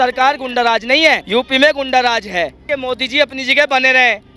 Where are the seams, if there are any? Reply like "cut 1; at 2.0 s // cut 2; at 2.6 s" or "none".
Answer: cut 1; at 1.2 s // cut 2; at 2.7 s